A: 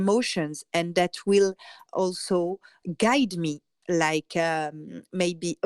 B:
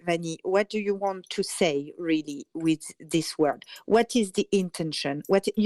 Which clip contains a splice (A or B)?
A